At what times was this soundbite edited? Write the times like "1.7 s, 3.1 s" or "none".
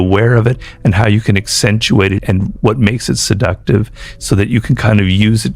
2.5 s